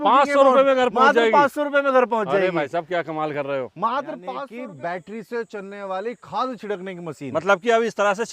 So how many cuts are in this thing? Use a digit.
1